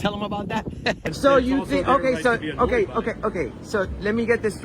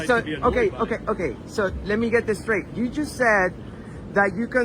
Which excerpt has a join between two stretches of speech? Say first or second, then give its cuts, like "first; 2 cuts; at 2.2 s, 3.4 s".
first; 1 cut; at 1.0 s